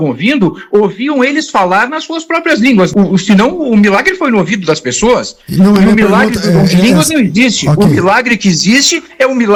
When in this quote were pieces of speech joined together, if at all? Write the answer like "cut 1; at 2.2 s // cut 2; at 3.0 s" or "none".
none